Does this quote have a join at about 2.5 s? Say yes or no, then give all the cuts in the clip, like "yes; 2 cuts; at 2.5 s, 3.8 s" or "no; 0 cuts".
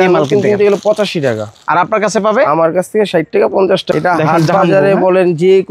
no; 1 cut; at 3.9 s